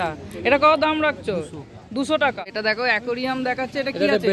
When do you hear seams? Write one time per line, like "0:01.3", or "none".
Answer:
0:02.4